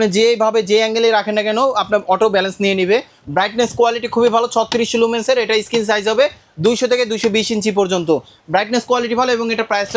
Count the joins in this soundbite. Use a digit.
0